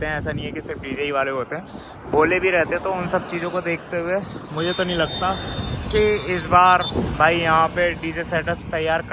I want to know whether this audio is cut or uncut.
uncut